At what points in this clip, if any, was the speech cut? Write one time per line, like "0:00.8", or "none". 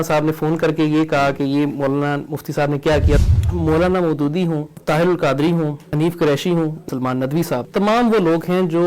0:03.2
0:04.7
0:05.8
0:07.2